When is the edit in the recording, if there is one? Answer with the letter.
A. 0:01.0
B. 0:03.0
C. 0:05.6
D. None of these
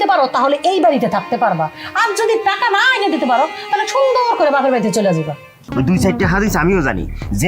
C